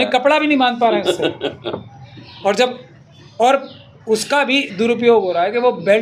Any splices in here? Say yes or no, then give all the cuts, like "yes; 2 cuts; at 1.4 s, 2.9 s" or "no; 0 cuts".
no; 0 cuts